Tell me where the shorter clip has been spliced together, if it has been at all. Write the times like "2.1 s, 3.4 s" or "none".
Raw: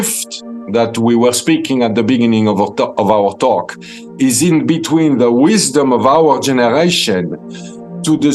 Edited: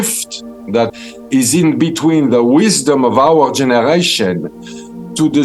0.9 s